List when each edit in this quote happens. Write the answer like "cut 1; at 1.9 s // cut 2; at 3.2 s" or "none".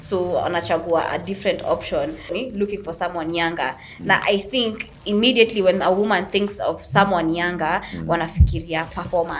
cut 1; at 2.3 s